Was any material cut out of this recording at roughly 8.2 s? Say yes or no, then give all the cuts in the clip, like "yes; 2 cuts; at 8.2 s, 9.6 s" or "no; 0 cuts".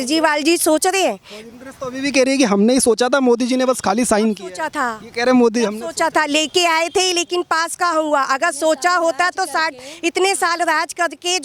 no; 0 cuts